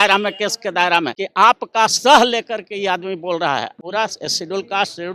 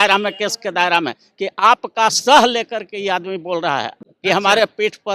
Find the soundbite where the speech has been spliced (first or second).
first